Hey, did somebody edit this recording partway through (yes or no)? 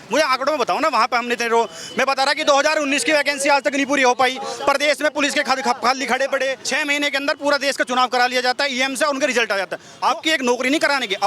yes